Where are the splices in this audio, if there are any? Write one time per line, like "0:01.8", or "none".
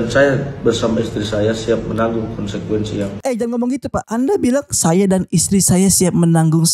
none